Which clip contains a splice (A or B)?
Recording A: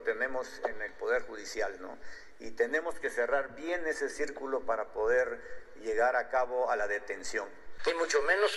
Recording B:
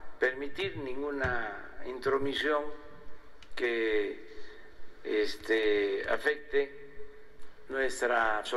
A